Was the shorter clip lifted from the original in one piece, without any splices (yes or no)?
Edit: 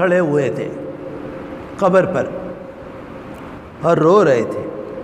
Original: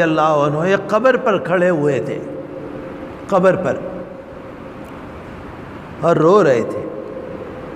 no